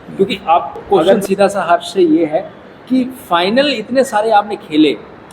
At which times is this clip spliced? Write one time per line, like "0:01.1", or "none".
0:01.2